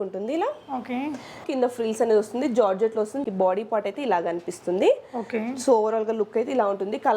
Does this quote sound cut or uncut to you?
cut